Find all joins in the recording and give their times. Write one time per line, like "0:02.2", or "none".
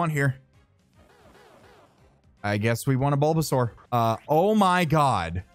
0:03.8